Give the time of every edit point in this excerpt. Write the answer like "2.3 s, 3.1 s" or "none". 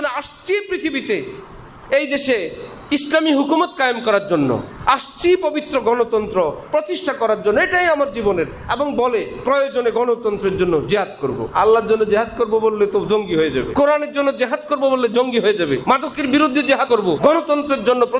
11.5 s, 13.7 s, 15.8 s, 17.0 s